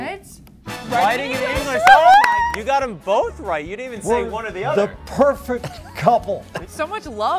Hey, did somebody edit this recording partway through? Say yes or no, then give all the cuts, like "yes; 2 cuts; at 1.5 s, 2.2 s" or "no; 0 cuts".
yes; 2 cuts; at 2.5 s, 6.5 s